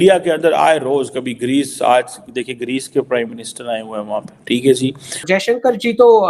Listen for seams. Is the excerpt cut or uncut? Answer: cut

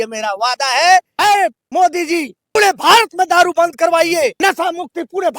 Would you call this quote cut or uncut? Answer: cut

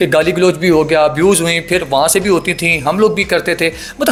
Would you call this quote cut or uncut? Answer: uncut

